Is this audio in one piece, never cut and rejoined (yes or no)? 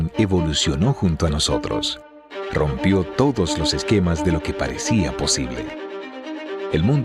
yes